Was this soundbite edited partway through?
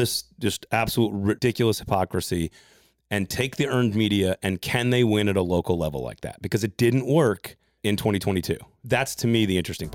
yes; 3 cuts; at 1.4 s, 7.8 s, 8.8 s

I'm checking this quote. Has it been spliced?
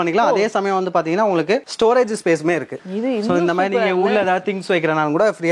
no; 0 cuts

